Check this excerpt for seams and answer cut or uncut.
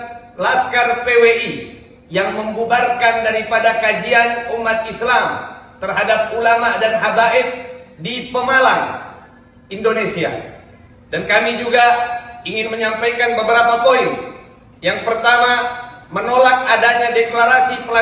uncut